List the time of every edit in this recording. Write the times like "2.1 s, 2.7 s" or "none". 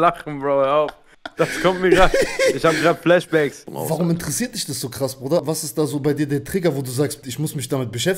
3.7 s, 5.4 s, 7.2 s